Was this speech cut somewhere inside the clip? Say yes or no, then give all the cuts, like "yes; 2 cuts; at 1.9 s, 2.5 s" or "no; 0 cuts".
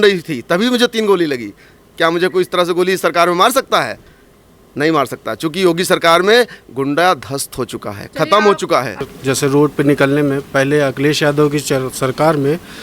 yes; 1 cut; at 9.1 s